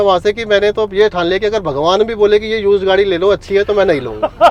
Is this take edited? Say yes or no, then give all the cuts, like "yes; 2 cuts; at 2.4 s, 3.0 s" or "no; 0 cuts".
no; 0 cuts